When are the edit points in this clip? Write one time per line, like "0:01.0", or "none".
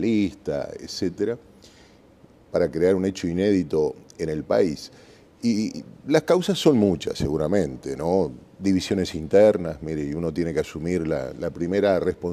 0:11.1